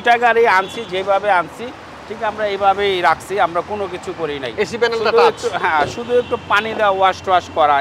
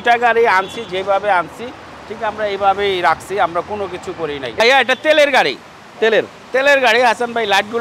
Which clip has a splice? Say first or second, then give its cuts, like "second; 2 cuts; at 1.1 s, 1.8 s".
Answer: second; 1 cut; at 4.6 s